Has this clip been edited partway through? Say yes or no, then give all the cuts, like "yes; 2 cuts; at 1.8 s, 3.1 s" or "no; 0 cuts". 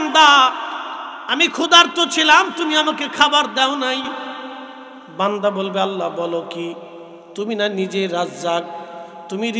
no; 0 cuts